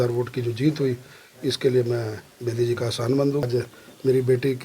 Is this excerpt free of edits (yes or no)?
no